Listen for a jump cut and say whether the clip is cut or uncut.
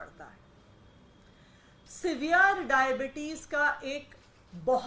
cut